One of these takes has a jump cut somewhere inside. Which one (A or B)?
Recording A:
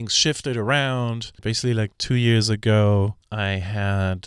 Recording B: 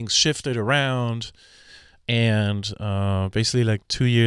A